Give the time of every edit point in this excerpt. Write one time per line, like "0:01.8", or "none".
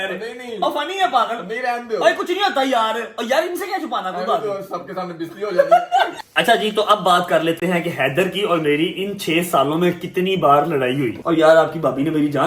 0:06.2
0:11.2